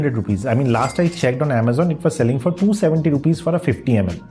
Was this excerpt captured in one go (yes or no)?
yes